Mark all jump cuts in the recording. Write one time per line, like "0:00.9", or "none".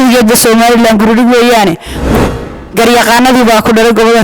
0:02.3